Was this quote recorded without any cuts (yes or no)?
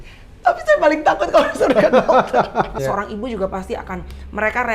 no